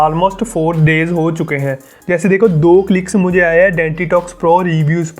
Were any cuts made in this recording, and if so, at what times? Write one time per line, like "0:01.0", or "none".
0:01.9